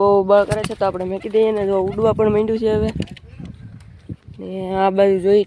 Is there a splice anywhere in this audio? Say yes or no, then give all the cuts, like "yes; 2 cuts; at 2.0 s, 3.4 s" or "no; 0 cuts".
no; 0 cuts